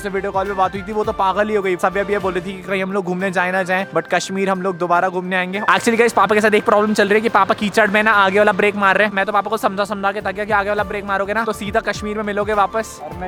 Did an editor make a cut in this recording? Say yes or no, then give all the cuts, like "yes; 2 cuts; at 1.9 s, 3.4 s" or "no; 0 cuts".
no; 0 cuts